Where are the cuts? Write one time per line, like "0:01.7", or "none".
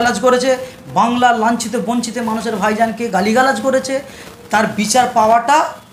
none